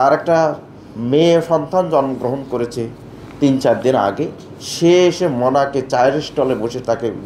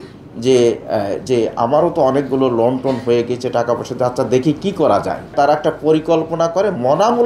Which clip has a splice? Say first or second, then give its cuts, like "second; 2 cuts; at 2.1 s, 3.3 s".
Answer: second; 1 cut; at 5.3 s